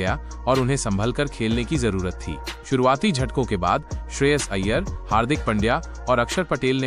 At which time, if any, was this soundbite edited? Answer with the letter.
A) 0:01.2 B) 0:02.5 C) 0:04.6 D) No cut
B